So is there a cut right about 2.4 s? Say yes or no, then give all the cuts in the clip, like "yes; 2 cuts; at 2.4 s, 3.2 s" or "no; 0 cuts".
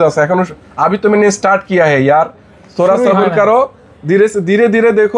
no; 0 cuts